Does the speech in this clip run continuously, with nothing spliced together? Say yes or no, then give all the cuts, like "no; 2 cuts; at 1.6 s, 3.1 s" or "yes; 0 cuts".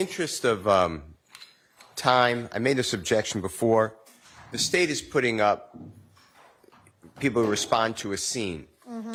yes; 0 cuts